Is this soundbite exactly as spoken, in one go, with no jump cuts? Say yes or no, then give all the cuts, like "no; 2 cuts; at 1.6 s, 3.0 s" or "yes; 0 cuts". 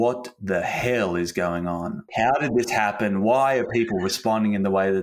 no; 1 cut; at 2.2 s